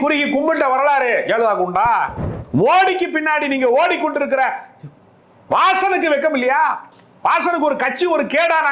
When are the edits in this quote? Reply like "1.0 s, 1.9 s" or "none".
2.4 s